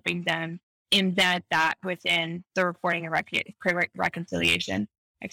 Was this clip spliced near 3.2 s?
no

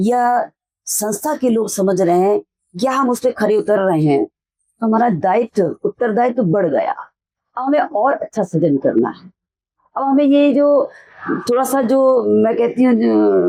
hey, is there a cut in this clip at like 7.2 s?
no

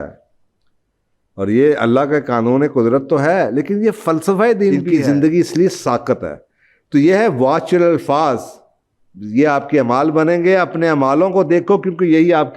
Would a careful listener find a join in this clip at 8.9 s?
no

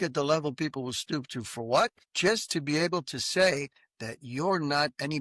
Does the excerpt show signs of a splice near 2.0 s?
yes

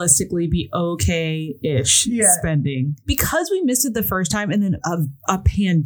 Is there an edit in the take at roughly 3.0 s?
yes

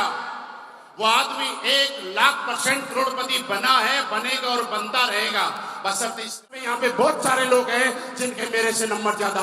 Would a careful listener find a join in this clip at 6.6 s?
yes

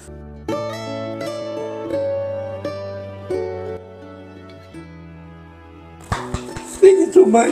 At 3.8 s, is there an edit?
no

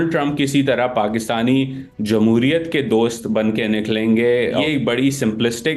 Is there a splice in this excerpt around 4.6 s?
yes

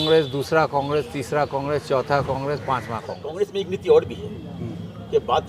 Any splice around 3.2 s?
yes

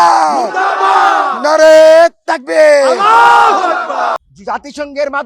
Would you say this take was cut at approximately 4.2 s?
yes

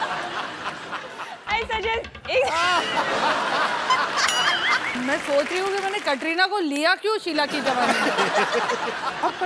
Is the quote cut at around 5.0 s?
yes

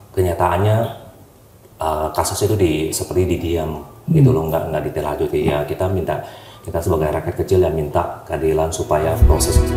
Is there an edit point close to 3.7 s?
no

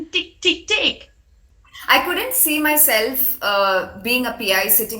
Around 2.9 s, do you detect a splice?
no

